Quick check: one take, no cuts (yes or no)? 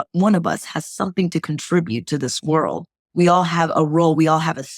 yes